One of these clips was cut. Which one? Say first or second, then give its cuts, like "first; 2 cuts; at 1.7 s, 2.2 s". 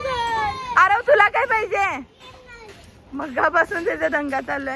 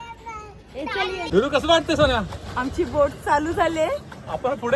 second; 1 cut; at 1.3 s